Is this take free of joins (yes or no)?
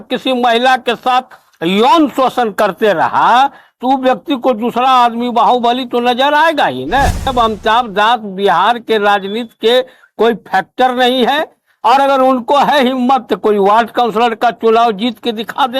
no